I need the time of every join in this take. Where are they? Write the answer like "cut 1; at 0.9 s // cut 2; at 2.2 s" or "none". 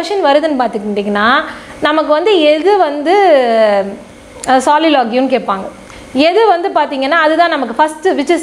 none